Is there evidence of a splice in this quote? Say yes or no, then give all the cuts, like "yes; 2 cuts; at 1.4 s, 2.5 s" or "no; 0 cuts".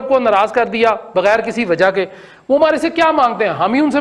no; 0 cuts